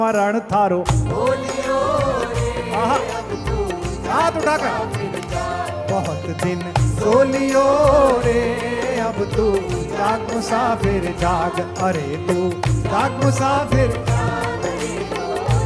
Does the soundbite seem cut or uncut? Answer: uncut